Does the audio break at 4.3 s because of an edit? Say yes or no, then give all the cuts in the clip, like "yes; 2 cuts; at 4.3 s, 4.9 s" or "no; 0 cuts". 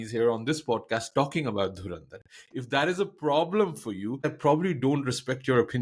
yes; 1 cut; at 4.3 s